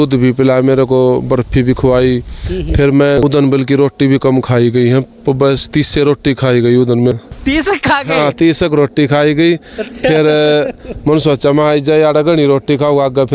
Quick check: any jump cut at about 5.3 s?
no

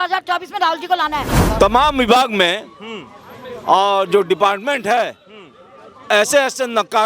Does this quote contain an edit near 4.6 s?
no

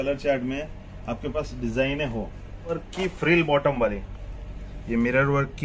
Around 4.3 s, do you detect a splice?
no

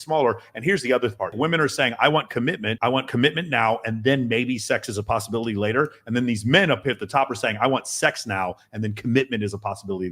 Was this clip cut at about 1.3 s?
yes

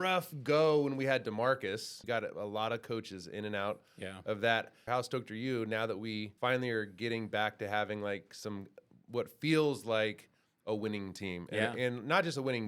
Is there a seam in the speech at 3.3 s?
no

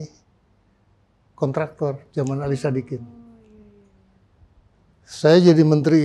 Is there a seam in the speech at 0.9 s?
no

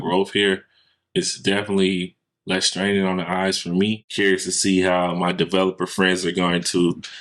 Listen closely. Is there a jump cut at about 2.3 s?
no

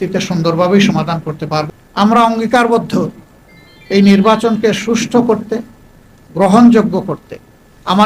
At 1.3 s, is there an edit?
yes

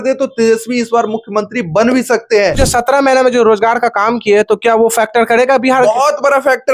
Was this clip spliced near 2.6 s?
yes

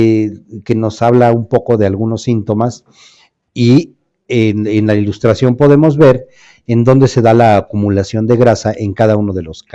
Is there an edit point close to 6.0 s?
yes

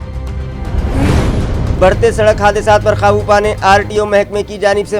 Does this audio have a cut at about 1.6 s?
yes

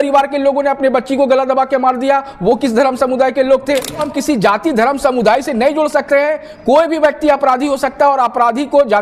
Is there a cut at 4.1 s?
yes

